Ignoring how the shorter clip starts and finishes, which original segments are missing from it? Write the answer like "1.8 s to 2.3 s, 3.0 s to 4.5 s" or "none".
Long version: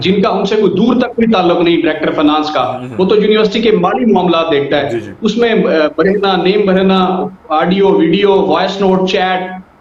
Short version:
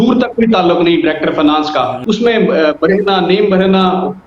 2.8 s to 5.1 s